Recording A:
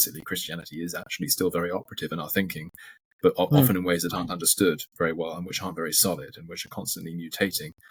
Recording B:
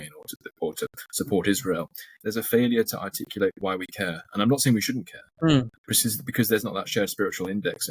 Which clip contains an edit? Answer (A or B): B